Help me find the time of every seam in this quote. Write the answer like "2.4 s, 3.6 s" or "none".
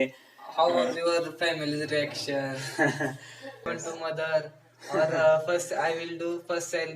3.7 s